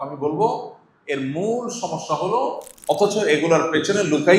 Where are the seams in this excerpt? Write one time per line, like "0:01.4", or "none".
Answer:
0:02.7